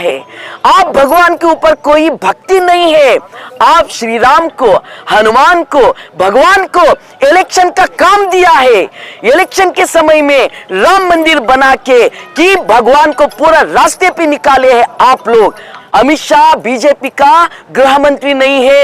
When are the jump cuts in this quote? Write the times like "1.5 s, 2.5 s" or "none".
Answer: 15.7 s